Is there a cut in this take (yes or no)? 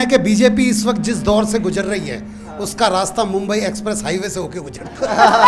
no